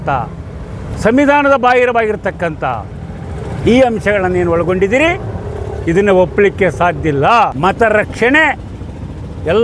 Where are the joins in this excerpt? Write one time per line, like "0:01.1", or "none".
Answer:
0:07.5